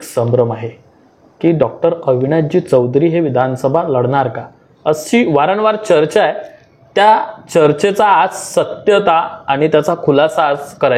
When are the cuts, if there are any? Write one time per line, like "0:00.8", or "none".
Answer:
none